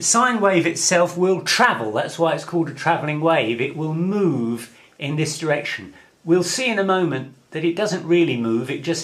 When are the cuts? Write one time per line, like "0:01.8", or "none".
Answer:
0:06.5